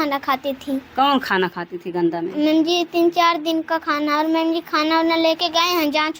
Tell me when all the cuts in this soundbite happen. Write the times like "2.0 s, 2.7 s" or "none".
none